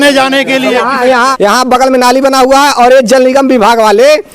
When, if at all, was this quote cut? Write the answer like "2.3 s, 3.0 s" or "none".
1.3 s